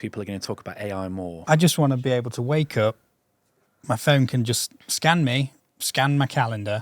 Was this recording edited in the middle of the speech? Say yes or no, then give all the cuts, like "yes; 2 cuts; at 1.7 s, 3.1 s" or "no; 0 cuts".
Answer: yes; 1 cut; at 1.5 s